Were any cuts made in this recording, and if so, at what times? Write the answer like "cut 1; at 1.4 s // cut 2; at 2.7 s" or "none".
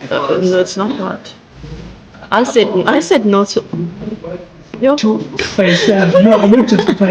cut 1; at 5.3 s